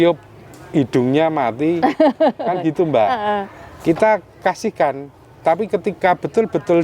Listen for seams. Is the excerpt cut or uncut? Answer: uncut